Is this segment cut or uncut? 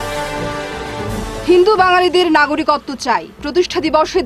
cut